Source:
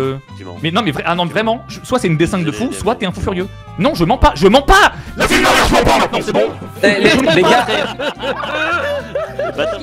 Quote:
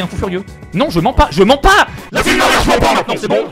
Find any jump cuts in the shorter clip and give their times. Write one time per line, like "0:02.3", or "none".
none